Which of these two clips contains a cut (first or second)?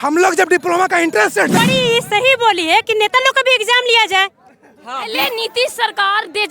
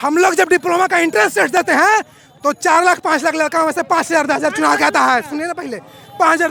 first